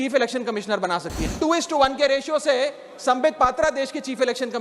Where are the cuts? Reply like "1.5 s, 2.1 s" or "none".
1.2 s